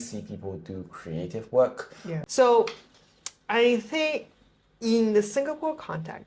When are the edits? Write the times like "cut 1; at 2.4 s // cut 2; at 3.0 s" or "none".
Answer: cut 1; at 2.0 s